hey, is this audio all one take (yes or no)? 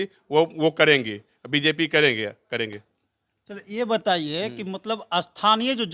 yes